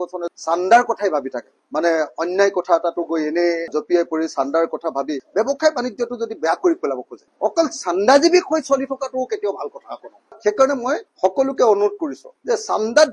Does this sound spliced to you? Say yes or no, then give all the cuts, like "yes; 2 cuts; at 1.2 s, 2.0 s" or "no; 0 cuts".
yes; 3 cuts; at 1.6 s, 7.2 s, 10.3 s